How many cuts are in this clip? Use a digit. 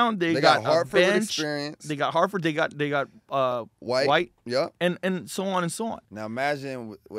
2